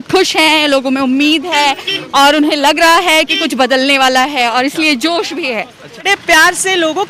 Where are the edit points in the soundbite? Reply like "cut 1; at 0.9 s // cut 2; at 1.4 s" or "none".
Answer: cut 1; at 6.0 s